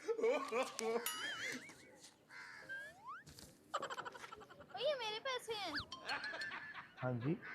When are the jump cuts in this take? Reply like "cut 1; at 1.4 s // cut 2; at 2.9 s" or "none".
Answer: cut 1; at 1.1 s